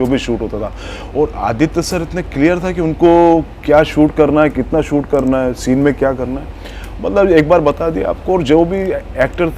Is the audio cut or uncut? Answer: uncut